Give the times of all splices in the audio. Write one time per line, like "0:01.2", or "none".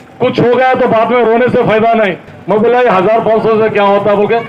0:02.3

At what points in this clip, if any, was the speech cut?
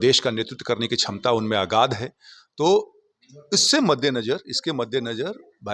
none

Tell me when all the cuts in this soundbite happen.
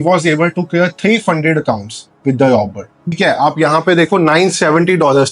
none

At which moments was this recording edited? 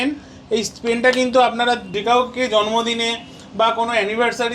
0:01.9

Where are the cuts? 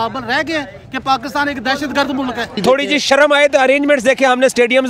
0:02.6

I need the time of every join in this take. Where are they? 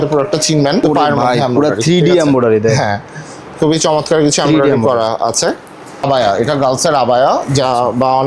0:00.8
0:06.0

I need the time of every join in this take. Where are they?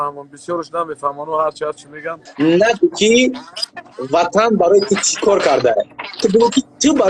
0:02.2

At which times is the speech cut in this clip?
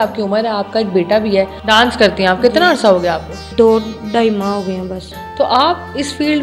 0:01.6
0:03.5
0:05.1

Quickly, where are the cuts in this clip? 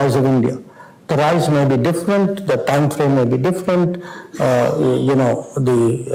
none

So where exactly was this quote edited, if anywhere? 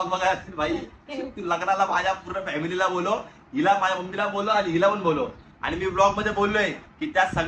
none

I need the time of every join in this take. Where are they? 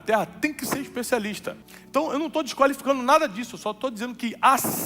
0:01.7

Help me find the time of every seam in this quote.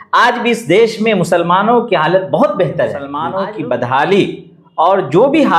0:03.1

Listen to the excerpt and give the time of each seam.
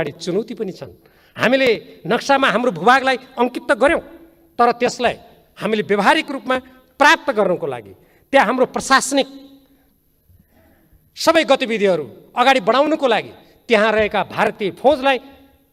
none

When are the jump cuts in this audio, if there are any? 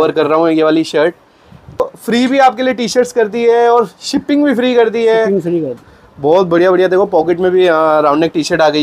0:01.8
0:05.8

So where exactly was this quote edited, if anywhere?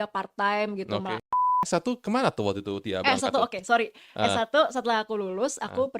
0:01.7

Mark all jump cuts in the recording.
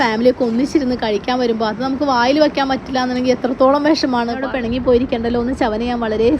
0:04.4

